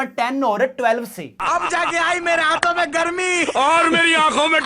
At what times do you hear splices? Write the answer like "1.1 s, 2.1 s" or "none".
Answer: none